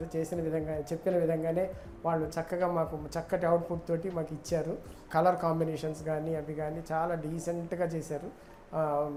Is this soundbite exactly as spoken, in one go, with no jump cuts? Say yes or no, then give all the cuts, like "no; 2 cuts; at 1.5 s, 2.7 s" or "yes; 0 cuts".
yes; 0 cuts